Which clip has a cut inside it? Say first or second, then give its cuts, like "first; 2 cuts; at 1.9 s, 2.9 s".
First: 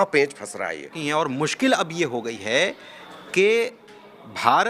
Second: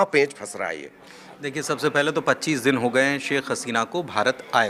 first; 1 cut; at 0.9 s